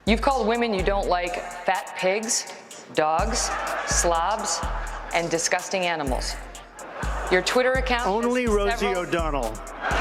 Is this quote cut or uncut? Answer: uncut